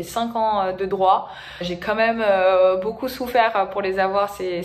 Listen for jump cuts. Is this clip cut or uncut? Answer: uncut